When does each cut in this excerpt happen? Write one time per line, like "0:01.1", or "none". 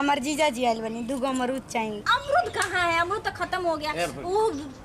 0:02.0